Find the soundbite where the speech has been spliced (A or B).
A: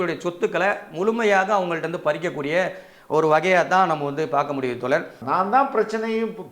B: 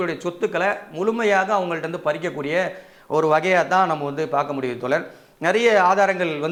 A